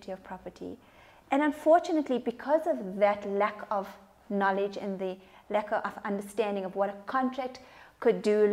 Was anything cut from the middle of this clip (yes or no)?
no